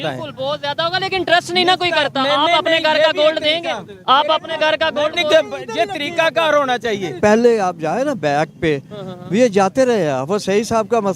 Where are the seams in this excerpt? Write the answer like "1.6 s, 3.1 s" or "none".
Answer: 7.2 s